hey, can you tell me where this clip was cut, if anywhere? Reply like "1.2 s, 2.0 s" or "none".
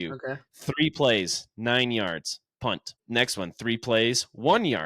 2.9 s